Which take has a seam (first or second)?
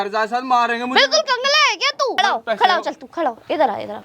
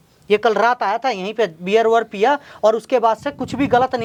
first